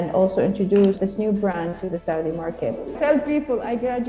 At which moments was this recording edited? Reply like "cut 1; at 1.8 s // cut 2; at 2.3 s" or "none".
cut 1; at 1.0 s // cut 2; at 3.0 s